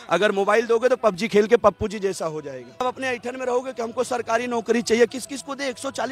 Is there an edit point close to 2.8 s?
yes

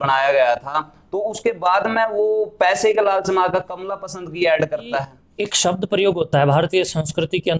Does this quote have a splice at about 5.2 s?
yes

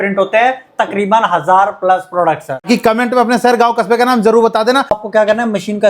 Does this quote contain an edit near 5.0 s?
yes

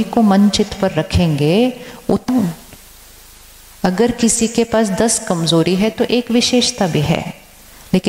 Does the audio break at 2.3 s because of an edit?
yes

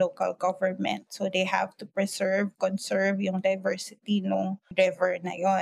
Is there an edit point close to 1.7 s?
no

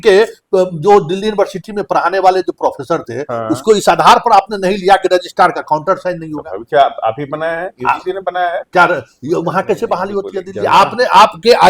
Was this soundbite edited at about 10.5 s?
yes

